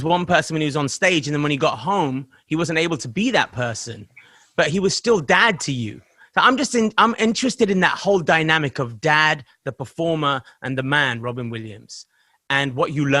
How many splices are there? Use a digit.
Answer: 0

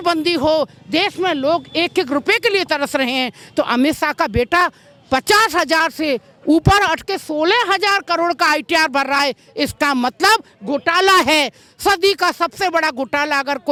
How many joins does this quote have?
0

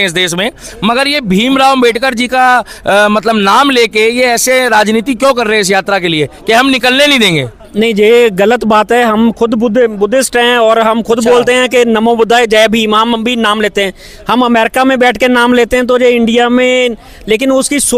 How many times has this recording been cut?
0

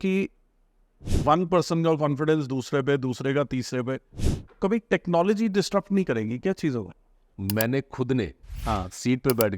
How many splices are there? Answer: 1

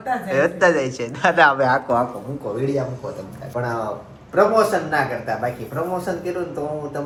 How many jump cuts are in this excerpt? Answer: 0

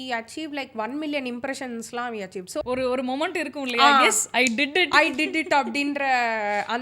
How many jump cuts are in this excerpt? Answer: 1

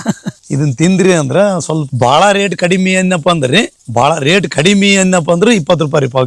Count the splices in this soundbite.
1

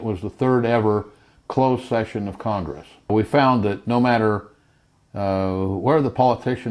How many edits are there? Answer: 1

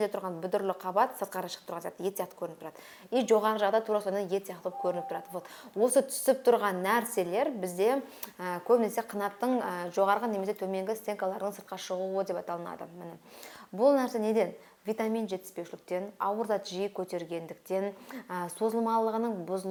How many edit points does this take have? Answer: 0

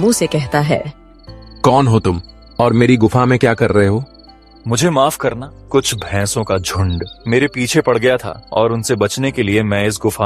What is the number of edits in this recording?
3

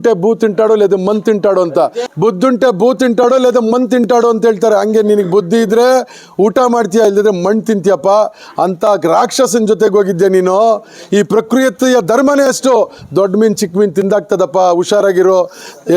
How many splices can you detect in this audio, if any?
1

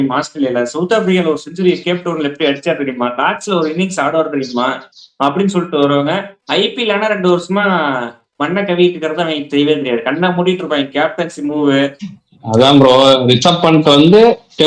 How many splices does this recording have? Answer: 1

